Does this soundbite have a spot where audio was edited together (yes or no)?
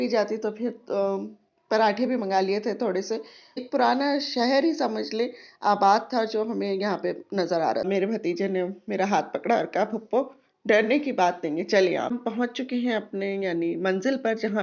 yes